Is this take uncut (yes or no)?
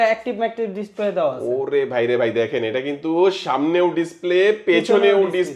yes